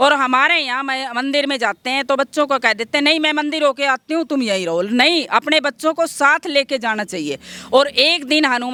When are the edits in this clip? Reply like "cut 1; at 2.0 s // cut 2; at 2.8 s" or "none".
none